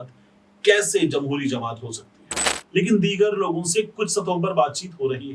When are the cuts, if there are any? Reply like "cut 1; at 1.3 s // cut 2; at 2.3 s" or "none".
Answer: cut 1; at 2.5 s

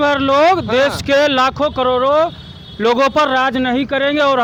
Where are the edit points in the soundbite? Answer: none

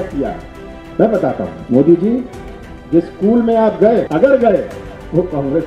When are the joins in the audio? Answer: cut 1; at 1.6 s // cut 2; at 4.1 s

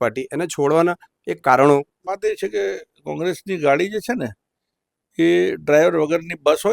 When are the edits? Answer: cut 1; at 2.1 s

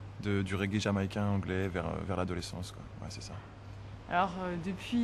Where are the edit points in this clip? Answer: none

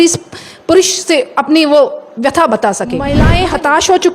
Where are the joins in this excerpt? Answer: cut 1; at 3.2 s

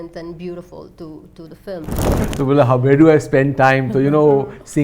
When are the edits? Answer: cut 1; at 2.2 s

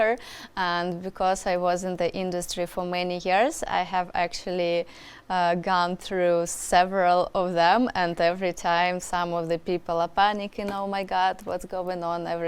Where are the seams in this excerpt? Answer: none

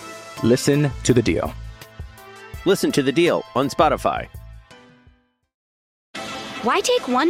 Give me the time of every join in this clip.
cut 1; at 6.1 s

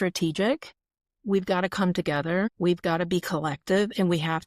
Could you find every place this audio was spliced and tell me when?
cut 1; at 2.5 s

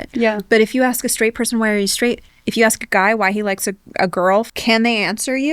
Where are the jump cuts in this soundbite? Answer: cut 1; at 2.3 s // cut 2; at 4.5 s

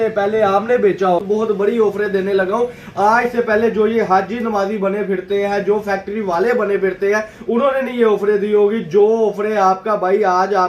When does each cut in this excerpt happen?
cut 1; at 1.2 s

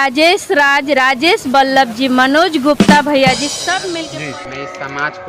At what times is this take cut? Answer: cut 1; at 4.0 s

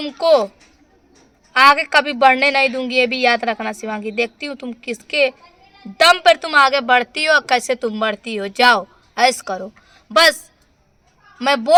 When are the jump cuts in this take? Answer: none

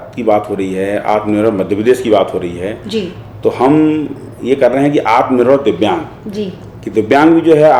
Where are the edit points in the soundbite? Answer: none

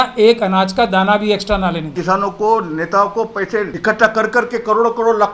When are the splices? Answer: cut 1; at 1.9 s // cut 2; at 3.7 s

